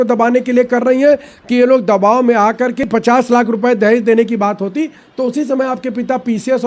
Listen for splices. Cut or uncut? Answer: cut